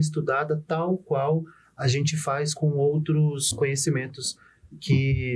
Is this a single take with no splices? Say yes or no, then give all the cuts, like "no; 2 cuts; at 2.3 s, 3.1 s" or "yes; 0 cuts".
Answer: no; 2 cuts; at 2.5 s, 3.5 s